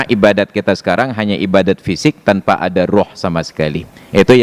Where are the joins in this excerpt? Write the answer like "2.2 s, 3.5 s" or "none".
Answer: none

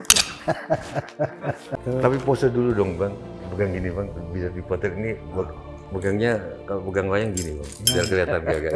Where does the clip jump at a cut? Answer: 1.8 s

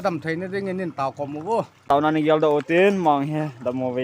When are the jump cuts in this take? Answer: 1.8 s

